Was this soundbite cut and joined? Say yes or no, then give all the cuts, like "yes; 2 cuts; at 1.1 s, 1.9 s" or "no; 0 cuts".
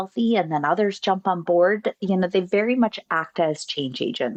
no; 0 cuts